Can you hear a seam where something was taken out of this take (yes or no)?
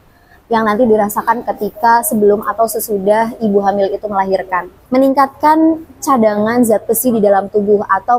yes